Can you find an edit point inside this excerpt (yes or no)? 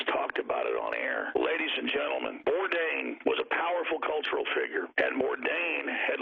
yes